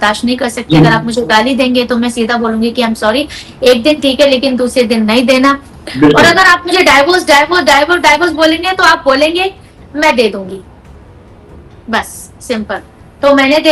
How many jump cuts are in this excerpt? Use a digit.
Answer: 0